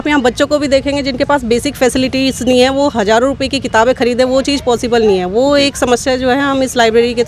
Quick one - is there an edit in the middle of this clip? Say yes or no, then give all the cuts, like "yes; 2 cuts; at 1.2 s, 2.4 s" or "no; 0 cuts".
no; 0 cuts